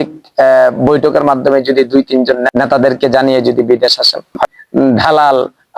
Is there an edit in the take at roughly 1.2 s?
no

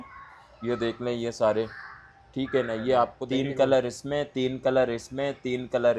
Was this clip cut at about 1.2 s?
no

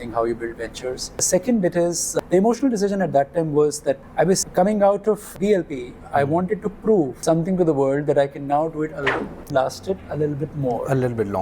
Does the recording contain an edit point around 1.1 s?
yes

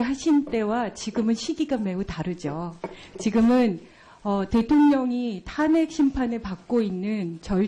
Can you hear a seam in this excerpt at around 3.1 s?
yes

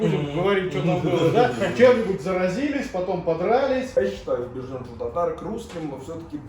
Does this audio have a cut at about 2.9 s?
no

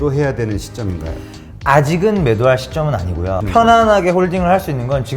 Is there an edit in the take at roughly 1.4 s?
no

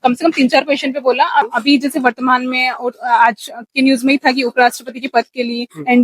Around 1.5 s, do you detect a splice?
yes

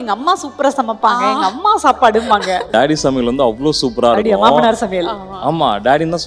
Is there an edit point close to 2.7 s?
yes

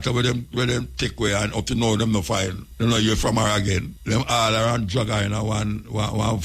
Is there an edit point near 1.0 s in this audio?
no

